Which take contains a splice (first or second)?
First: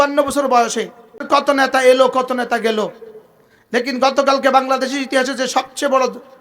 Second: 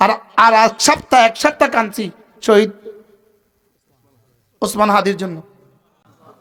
first